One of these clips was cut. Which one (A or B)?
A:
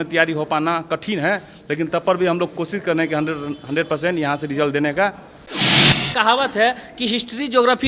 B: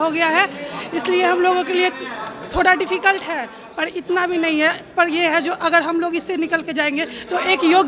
A